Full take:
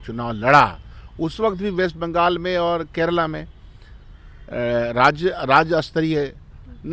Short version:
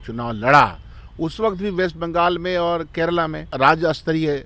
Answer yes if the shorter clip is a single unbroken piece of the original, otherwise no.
no